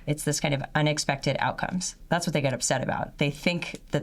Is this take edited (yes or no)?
yes